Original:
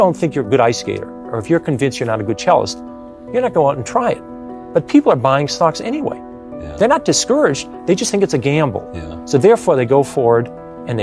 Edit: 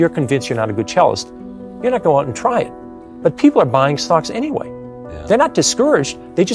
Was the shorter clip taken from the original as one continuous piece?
yes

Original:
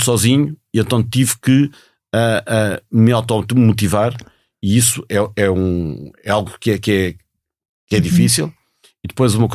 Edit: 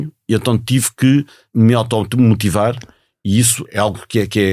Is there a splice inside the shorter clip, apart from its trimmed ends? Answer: yes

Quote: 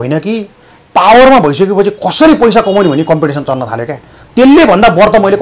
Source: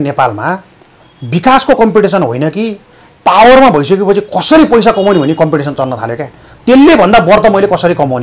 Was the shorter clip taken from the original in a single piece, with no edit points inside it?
yes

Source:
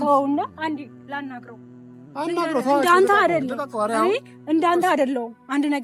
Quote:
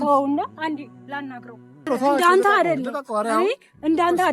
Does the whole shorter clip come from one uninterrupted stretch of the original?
no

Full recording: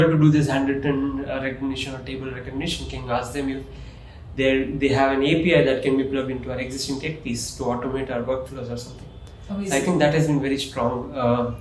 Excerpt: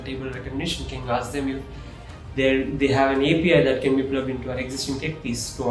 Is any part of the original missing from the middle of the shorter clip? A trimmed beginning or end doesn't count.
no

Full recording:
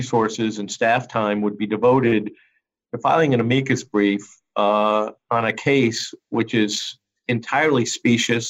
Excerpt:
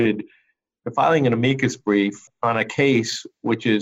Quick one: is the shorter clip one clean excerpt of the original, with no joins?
no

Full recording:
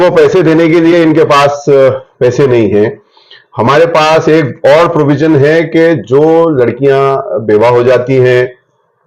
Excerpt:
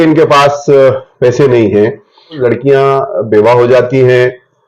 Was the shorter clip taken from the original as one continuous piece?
no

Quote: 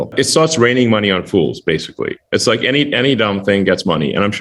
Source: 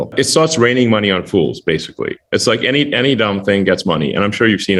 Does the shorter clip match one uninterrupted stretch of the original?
yes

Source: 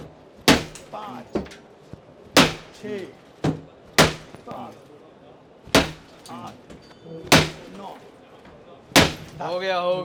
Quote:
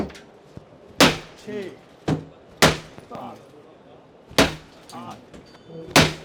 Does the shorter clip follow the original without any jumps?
yes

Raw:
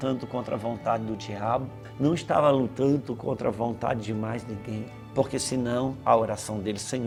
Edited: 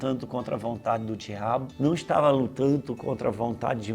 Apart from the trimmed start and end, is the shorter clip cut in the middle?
yes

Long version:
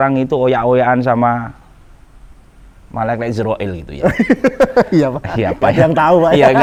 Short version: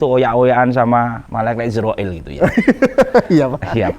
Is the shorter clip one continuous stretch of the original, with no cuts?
no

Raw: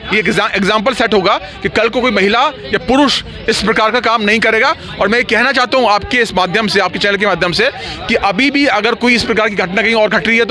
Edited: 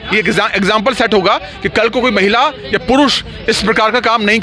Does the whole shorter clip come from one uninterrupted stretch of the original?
yes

